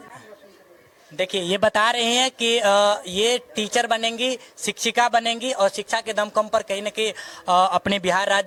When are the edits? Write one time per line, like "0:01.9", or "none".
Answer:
none